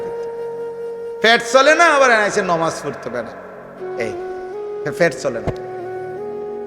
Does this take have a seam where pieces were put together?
yes; 1 cut; at 1.2 s

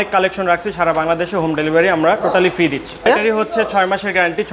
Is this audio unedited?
no; 1 cut; at 3.1 s

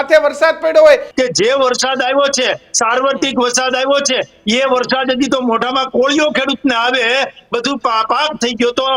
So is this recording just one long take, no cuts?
no; 1 cut; at 1.1 s

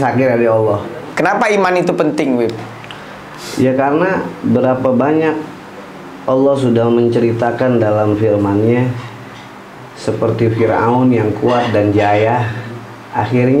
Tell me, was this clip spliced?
yes; 1 cut; at 1.1 s

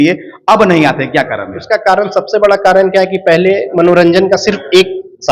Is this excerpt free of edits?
yes; 0 cuts

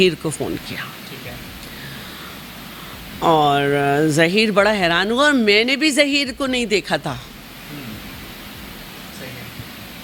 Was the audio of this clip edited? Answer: no; 0 cuts

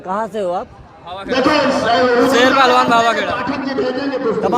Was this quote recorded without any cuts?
yes; 0 cuts

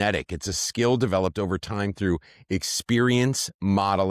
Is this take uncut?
yes; 0 cuts

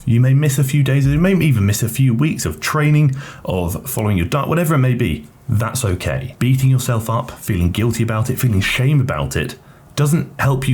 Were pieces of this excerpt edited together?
no; 0 cuts

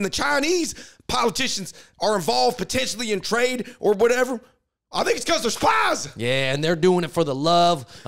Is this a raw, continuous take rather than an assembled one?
yes; 0 cuts

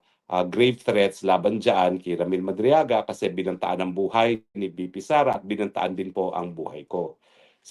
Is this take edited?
no; 0 cuts

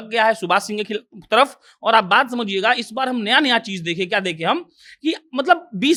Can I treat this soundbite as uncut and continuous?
yes; 0 cuts

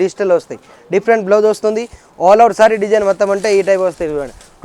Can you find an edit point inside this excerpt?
no; 0 cuts

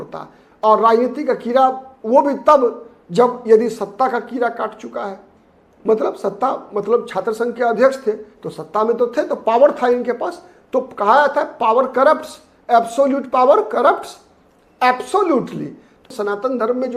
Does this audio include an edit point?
yes; 1 cut; at 16.0 s

